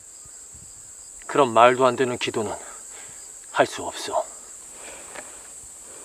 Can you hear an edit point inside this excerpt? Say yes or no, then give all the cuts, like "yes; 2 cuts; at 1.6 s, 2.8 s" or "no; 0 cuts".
yes; 1 cut; at 4.6 s